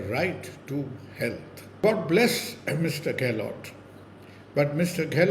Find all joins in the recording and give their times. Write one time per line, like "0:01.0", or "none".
0:01.8